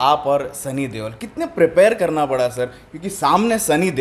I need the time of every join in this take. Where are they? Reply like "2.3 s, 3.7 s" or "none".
none